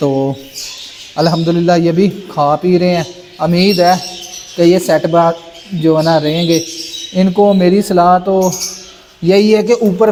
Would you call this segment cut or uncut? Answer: uncut